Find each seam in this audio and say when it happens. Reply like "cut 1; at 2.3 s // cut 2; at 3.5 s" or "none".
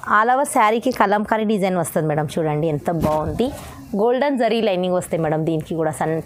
none